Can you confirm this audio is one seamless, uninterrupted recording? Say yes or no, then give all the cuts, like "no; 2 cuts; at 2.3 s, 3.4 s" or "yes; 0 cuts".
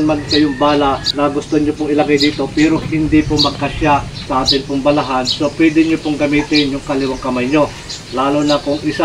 no; 2 cuts; at 1.0 s, 4.2 s